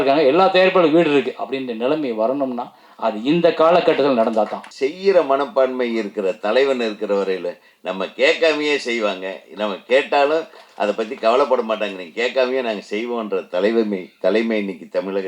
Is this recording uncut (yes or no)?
no